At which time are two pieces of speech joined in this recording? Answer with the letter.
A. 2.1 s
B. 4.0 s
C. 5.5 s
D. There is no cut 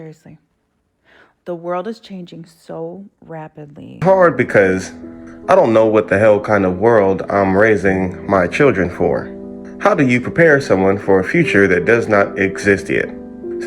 B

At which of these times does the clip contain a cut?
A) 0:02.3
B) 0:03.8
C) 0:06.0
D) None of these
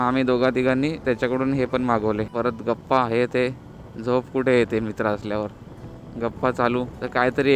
A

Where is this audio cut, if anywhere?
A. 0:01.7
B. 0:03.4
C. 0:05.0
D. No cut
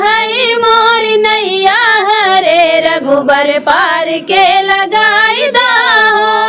D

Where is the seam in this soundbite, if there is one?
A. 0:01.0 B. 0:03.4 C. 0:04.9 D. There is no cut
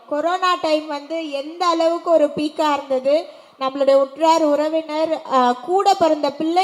D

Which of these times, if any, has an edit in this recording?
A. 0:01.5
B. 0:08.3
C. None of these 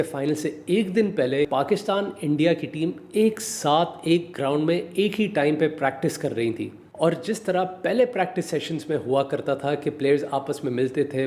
A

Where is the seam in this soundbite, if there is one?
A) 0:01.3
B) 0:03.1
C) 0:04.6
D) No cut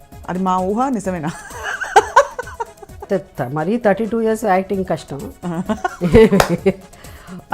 B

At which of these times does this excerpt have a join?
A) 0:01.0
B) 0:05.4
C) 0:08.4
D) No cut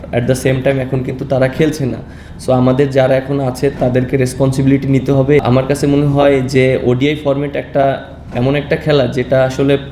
B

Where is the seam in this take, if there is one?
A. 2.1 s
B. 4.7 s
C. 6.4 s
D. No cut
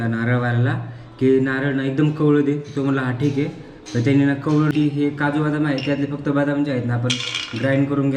B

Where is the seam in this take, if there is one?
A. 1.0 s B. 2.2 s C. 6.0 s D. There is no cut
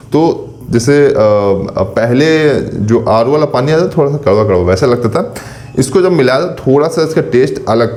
D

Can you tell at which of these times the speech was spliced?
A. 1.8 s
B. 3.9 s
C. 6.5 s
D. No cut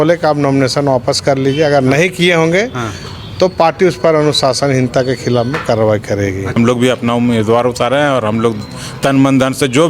C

